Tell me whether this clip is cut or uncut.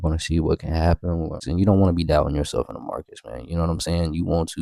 cut